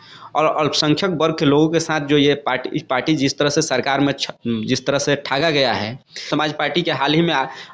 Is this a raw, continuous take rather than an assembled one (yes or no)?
no